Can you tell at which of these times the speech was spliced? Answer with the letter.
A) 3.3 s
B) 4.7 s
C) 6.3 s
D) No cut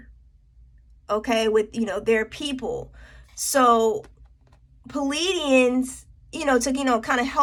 D